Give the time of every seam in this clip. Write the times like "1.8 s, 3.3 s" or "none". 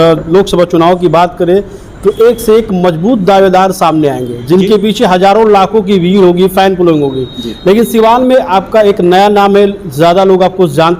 none